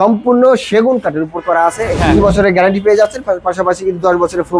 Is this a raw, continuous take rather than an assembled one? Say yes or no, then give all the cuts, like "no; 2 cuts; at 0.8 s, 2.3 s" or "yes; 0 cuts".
no; 1 cut; at 2.0 s